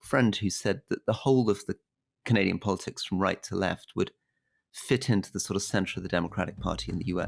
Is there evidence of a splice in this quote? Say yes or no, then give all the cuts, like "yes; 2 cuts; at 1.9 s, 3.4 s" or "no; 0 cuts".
no; 0 cuts